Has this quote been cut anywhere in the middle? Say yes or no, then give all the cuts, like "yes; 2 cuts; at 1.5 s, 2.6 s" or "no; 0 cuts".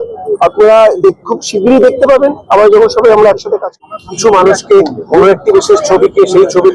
yes; 1 cut; at 3.8 s